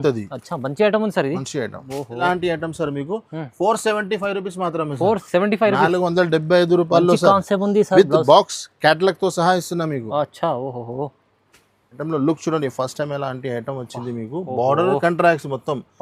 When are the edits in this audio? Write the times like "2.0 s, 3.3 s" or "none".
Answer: 2.2 s, 12.0 s